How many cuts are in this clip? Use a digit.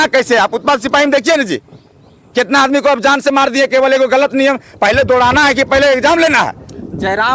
0